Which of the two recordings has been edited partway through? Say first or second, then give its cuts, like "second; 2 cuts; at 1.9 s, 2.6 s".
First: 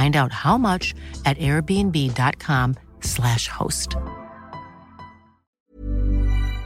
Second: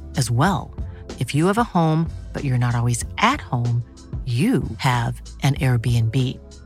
first; 1 cut; at 5.5 s